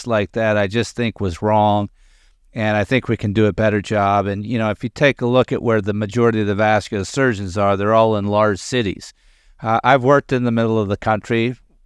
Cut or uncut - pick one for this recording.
uncut